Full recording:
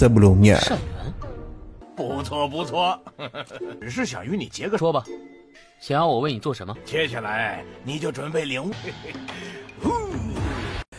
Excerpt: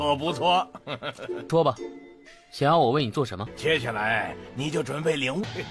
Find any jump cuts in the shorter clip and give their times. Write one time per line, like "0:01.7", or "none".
0:01.5

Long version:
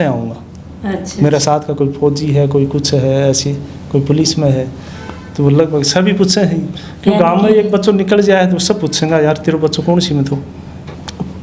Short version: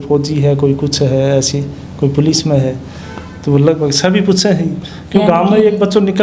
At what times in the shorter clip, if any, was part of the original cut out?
none

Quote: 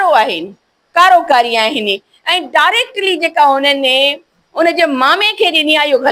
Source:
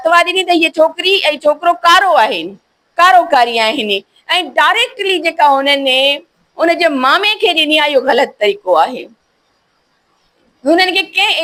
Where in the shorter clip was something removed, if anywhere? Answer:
none

